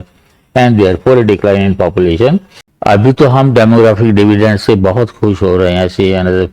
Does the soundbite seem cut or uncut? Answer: cut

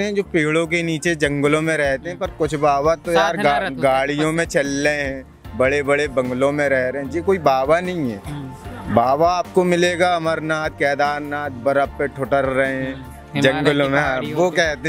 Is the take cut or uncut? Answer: uncut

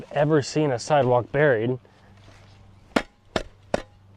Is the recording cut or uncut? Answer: uncut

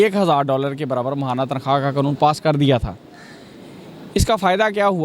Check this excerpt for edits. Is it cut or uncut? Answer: uncut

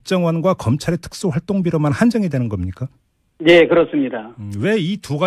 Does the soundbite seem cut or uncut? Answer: cut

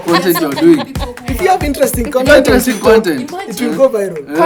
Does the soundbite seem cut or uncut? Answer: uncut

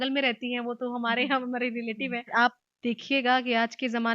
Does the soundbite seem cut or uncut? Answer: cut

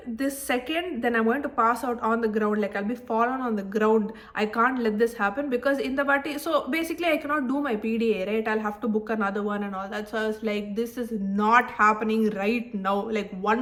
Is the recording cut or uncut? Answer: uncut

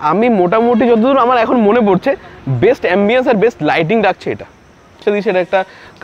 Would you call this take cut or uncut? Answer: cut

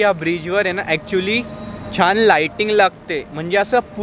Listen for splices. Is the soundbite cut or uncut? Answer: uncut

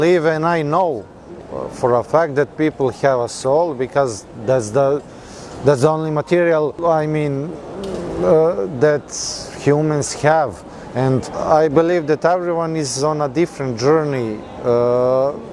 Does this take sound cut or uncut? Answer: uncut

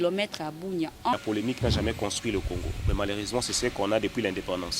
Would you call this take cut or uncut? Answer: cut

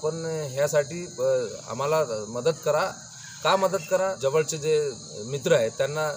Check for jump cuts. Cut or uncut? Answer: cut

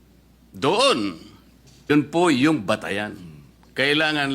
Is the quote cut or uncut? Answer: cut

